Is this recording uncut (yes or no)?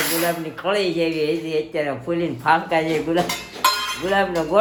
yes